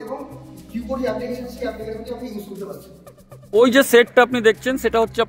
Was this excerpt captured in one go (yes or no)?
no